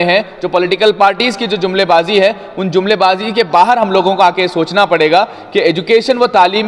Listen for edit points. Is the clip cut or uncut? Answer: uncut